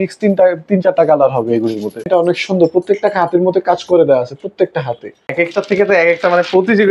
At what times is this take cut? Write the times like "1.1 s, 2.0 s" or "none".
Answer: 2.1 s, 5.3 s